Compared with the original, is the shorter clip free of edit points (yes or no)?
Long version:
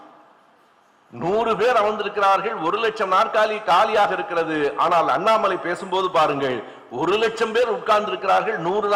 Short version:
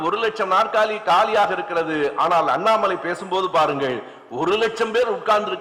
yes